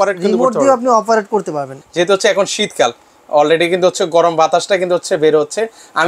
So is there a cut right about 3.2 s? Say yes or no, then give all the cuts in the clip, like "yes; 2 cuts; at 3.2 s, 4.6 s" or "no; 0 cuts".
no; 1 cut; at 1.8 s